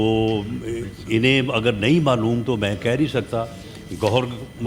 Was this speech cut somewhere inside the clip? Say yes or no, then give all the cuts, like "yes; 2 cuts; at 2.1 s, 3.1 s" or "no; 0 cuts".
no; 0 cuts